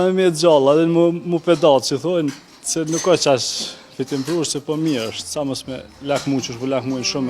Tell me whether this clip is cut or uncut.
uncut